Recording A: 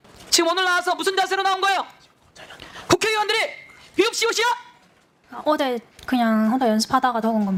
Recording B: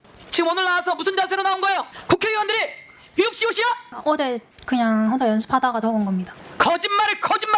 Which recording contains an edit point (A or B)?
B